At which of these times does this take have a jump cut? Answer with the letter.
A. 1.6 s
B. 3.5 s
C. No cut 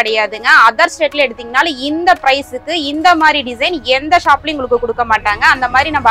C